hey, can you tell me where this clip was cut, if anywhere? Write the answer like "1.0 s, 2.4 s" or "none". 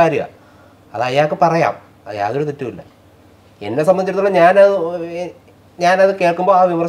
none